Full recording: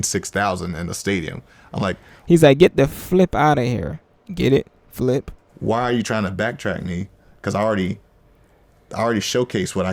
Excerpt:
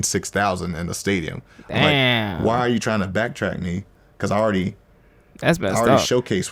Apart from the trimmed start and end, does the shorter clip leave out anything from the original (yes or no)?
yes